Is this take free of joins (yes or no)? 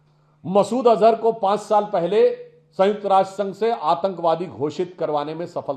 yes